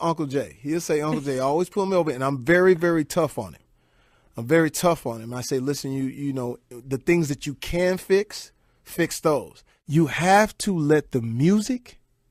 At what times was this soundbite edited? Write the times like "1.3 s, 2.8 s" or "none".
none